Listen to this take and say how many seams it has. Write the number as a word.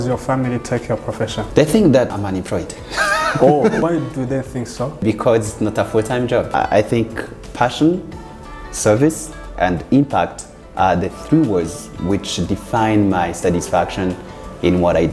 four